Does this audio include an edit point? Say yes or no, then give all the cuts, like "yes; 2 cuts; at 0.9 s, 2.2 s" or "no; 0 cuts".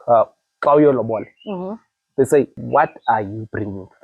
yes; 1 cut; at 2.6 s